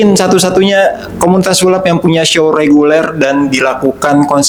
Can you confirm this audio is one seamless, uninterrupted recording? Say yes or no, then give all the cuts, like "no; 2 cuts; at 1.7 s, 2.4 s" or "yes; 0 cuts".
yes; 0 cuts